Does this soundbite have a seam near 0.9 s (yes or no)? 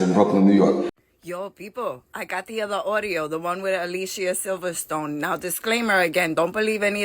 yes